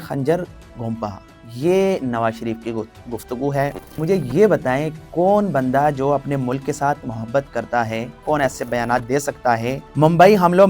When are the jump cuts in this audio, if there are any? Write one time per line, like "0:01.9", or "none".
0:04.0
0:08.2
0:09.8